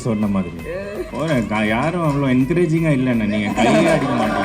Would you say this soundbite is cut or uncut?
cut